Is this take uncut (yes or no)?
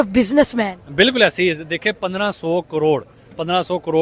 yes